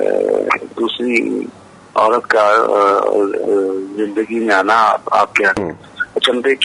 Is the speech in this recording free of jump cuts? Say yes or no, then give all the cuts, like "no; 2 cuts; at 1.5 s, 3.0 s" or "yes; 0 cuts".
yes; 0 cuts